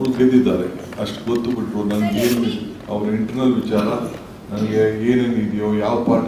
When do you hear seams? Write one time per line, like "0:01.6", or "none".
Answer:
none